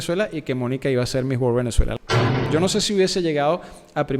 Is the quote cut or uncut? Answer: cut